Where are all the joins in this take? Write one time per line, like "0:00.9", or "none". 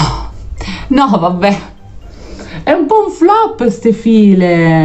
none